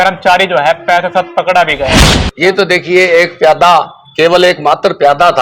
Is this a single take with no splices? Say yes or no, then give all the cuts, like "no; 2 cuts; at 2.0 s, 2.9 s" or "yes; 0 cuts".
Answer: no; 1 cut; at 2.2 s